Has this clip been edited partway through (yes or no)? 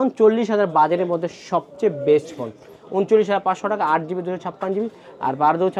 no